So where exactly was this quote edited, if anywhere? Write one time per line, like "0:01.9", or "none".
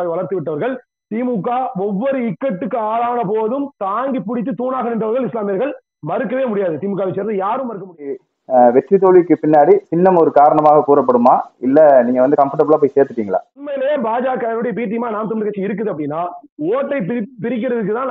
0:08.3
0:13.7

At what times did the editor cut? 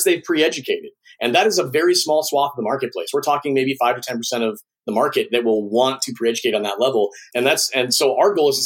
0:07.2

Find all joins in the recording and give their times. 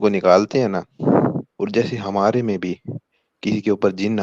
0:01.5

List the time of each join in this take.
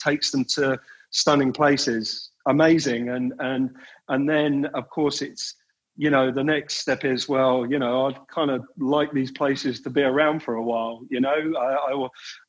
none

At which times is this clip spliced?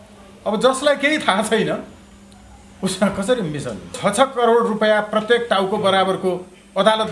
0:04.0

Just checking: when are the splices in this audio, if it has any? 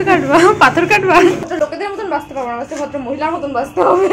0:01.5

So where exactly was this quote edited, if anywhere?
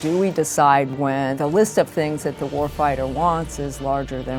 none

